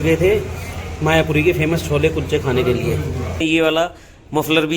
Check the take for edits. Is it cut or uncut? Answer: cut